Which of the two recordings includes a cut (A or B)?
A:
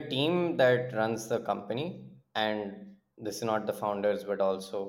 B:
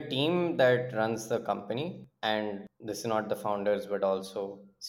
B